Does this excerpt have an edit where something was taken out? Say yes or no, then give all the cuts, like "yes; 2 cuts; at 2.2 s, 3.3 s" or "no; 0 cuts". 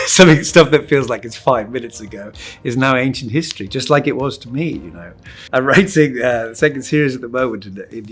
yes; 1 cut; at 5.4 s